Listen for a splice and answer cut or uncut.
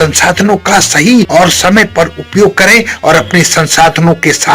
cut